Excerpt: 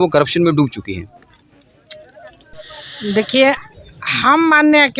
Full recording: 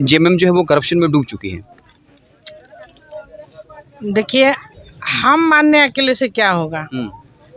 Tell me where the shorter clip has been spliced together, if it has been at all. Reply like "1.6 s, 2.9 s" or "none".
2.5 s